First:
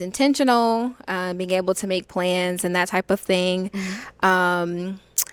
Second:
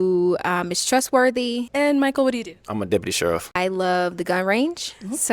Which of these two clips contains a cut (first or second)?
second